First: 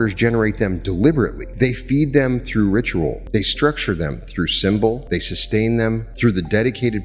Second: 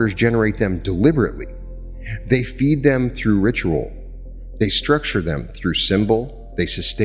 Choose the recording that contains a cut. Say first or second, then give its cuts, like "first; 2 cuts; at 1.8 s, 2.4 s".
first; 4 cuts; at 1.4 s, 3.2 s, 5.0 s, 6.1 s